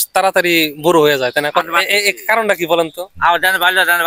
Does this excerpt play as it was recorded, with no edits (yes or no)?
no